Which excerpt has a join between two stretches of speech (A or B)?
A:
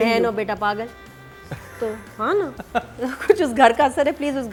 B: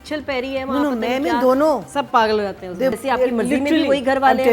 B